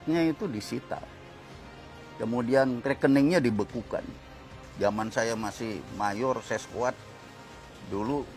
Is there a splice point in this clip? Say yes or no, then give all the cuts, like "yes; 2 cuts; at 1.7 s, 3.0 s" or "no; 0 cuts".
yes; 1 cut; at 4.6 s